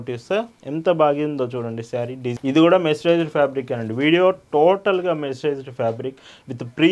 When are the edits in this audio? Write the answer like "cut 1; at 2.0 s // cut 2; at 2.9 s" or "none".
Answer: cut 1; at 2.2 s